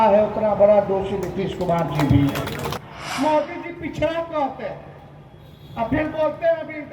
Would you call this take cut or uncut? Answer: cut